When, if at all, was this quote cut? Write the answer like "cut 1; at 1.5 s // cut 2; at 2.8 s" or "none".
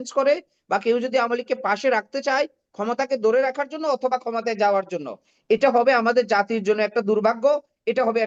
none